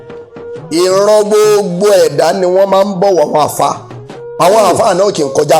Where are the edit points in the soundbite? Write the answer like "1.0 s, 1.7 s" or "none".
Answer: none